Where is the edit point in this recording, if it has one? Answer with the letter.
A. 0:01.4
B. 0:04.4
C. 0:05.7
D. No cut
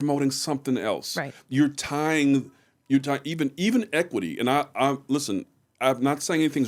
D